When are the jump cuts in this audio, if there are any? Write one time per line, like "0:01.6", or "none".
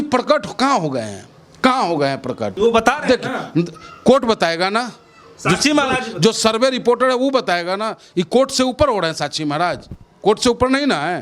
0:02.6

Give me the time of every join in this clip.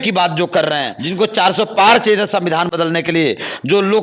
0:01.0

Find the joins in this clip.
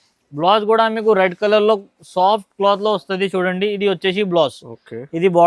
none

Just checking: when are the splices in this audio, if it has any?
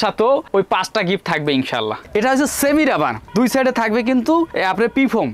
0:02.0

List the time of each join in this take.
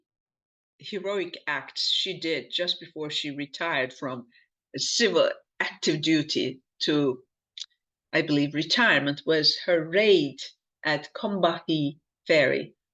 none

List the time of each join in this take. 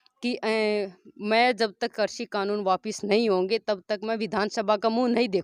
none

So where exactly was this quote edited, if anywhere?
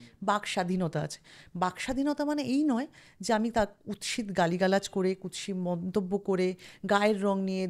none

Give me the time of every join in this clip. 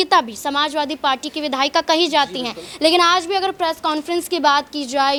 none

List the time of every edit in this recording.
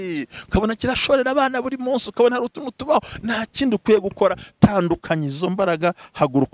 none

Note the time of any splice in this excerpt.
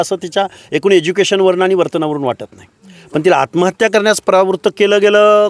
none

